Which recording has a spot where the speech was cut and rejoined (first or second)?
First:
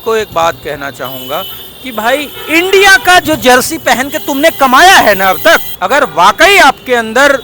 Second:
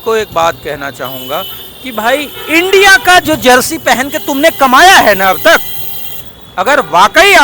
first